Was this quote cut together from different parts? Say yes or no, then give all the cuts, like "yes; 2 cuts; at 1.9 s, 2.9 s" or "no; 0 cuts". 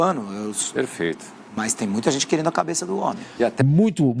yes; 1 cut; at 3.3 s